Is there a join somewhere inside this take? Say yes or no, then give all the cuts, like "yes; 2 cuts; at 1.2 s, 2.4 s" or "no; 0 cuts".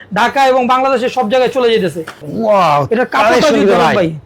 yes; 1 cut; at 2.3 s